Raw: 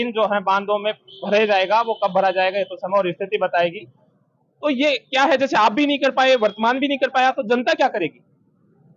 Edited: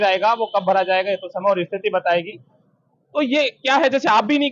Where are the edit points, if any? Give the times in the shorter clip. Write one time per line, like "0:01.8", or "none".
none